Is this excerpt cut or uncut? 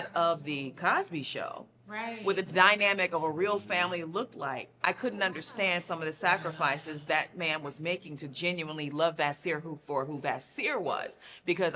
uncut